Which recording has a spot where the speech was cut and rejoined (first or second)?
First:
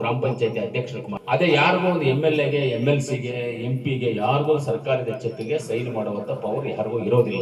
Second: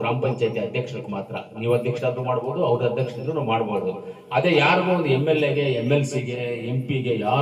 first